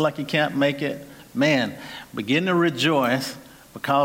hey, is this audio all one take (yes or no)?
no